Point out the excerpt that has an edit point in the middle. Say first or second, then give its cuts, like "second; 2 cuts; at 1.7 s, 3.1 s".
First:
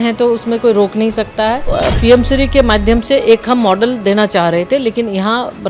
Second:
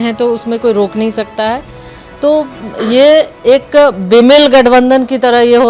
first; 1 cut; at 1.6 s